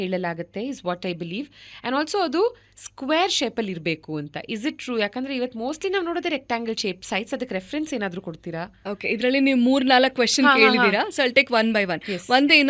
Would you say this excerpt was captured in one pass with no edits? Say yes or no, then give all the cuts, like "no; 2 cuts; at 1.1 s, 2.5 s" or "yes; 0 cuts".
yes; 0 cuts